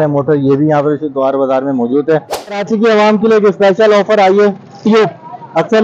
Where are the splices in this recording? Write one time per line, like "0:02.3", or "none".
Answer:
0:02.4